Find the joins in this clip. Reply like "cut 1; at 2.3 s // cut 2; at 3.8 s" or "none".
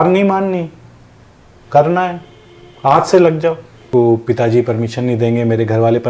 cut 1; at 3.9 s